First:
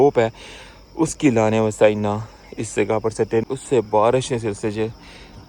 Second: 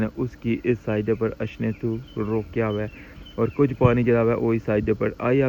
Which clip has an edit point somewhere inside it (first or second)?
first